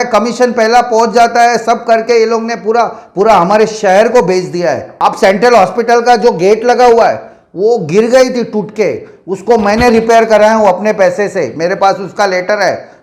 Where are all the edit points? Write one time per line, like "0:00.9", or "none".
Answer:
0:04.9